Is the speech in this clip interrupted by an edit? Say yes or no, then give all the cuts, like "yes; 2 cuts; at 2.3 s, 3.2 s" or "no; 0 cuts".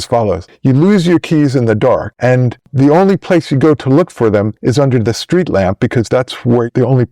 yes; 1 cut; at 2.2 s